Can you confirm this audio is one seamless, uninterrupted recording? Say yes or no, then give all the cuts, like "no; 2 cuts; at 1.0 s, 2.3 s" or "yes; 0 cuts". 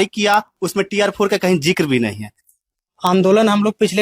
no; 1 cut; at 2.4 s